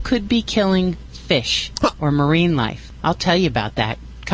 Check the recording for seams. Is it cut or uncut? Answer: cut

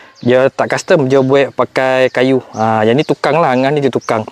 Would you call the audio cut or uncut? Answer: uncut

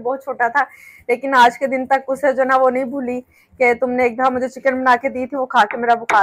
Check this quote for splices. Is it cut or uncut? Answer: uncut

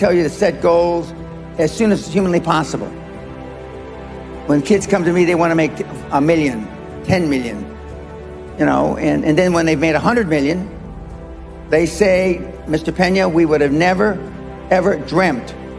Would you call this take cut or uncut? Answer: uncut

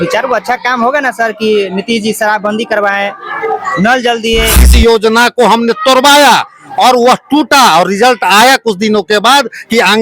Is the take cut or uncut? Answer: cut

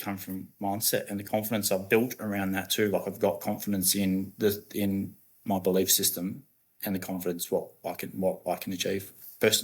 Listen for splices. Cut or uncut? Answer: uncut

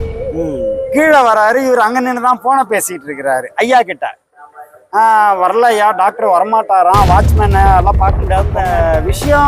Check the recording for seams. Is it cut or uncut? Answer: cut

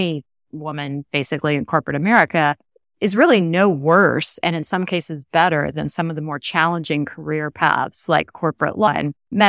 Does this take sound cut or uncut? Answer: uncut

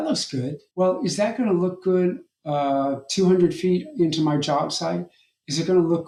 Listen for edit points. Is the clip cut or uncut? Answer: uncut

